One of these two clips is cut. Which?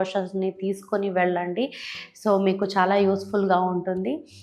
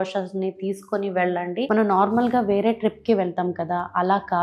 second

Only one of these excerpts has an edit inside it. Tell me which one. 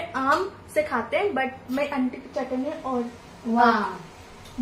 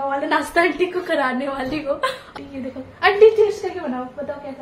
second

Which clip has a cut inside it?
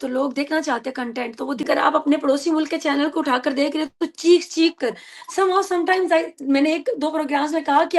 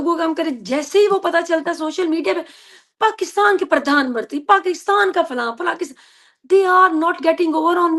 first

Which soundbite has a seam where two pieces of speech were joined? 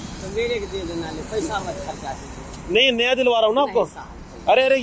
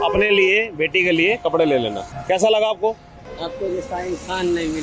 second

